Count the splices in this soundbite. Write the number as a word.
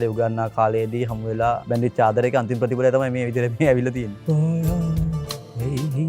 two